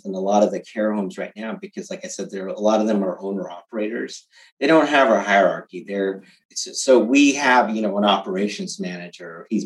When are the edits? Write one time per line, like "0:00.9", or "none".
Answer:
none